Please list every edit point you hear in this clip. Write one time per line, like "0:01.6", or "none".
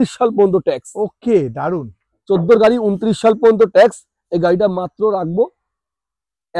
none